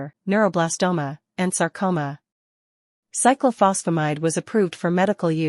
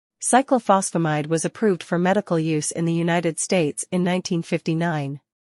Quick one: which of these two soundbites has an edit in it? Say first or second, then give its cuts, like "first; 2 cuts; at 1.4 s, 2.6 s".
first; 1 cut; at 1.0 s